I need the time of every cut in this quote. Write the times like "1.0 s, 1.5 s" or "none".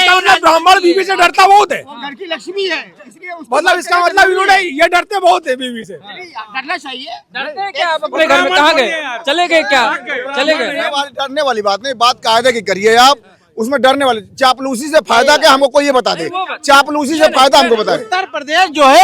none